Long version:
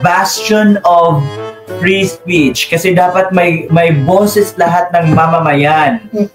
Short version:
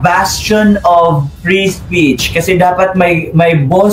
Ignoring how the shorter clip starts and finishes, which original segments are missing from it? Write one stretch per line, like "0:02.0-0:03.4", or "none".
0:01.3-0:01.7